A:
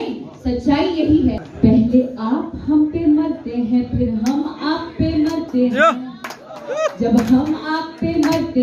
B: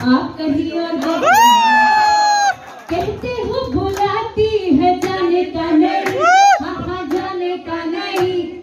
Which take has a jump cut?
A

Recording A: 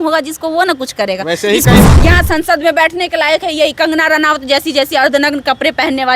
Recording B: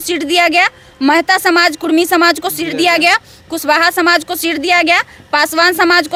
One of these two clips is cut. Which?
A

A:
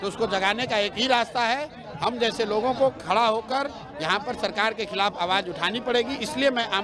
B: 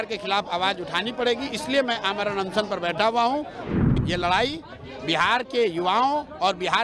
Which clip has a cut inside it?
B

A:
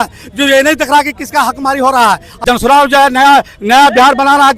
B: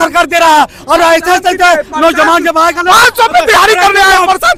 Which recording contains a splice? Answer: A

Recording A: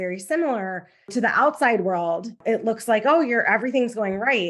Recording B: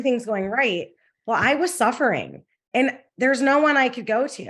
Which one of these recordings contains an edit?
A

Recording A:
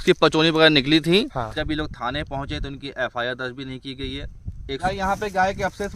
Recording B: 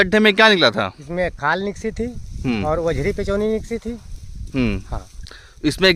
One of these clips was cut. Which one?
A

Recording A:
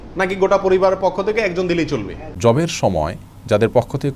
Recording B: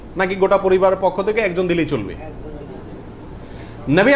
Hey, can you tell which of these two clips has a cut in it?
A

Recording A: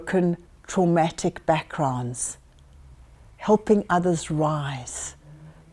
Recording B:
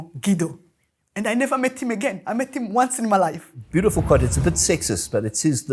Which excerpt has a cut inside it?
B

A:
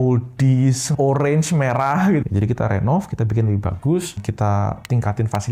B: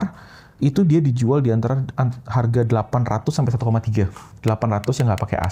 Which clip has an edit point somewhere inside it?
A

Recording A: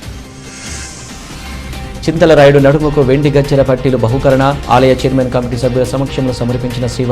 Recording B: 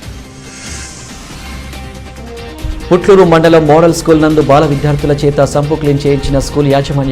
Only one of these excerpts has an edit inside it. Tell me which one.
B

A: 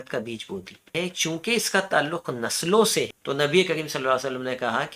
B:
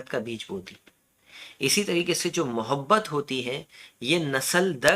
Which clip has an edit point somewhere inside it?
A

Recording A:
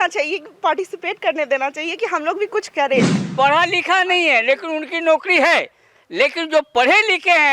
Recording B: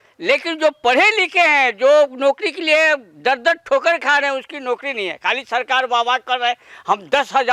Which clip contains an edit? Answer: A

